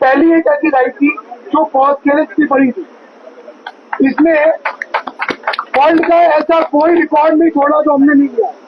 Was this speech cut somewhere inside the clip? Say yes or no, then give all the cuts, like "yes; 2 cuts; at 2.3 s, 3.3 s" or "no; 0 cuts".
no; 0 cuts